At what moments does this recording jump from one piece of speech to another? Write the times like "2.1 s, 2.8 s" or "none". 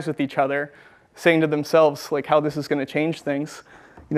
none

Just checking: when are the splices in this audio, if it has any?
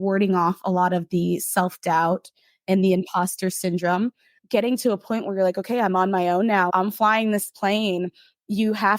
4.3 s, 6.7 s

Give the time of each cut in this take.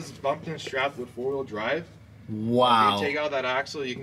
none

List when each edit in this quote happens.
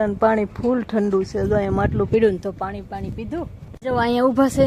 3.7 s

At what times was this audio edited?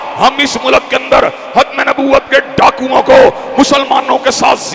none

